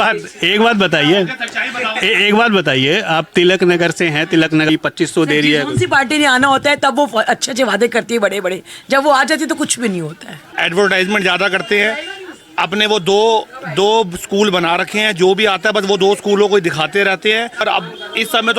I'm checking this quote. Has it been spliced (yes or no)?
yes